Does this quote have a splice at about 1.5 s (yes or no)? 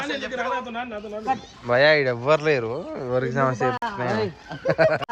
no